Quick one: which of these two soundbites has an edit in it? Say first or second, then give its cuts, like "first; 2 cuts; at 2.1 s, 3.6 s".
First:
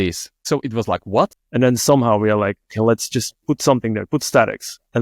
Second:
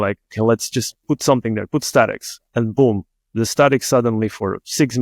first; 1 cut; at 1.4 s